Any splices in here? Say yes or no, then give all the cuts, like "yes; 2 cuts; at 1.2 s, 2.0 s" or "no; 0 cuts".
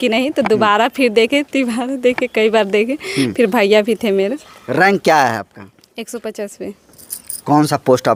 no; 0 cuts